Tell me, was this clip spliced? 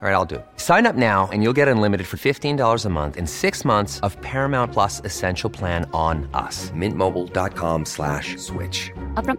no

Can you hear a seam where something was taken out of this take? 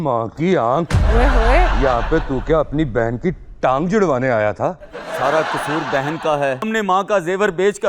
yes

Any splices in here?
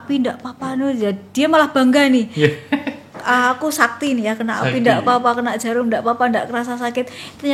no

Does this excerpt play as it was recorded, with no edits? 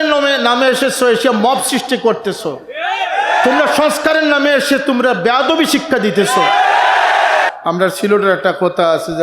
no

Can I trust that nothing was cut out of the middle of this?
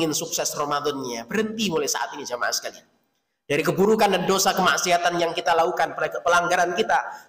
yes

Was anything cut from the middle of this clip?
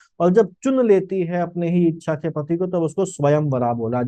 no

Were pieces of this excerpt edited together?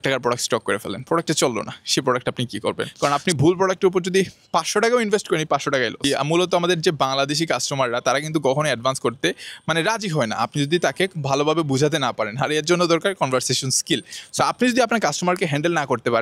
yes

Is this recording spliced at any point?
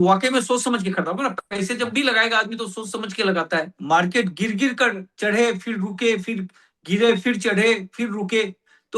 yes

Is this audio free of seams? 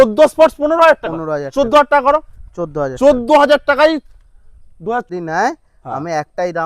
no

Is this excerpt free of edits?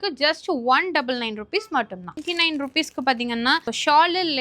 no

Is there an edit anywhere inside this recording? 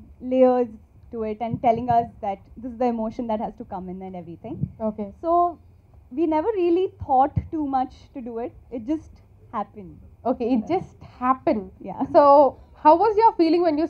no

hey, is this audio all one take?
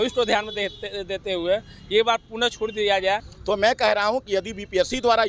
no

